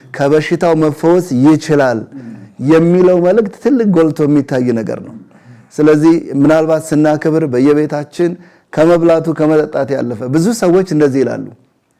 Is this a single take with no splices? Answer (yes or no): yes